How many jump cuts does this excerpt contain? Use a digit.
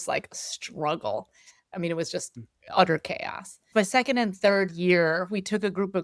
2